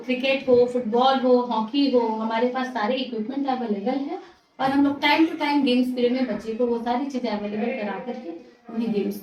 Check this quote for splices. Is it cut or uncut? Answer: uncut